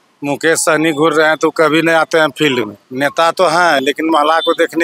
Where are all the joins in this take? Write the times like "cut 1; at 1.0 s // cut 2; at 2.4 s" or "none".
cut 1; at 2.8 s